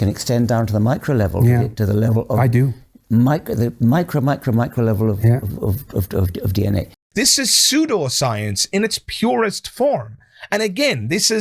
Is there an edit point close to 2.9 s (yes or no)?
no